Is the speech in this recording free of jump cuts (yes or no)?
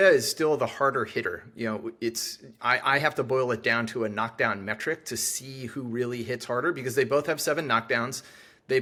yes